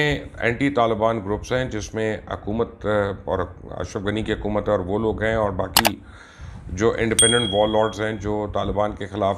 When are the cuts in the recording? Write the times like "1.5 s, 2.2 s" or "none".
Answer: none